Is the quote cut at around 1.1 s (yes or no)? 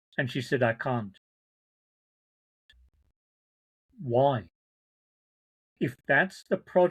no